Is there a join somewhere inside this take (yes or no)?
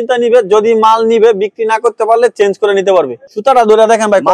yes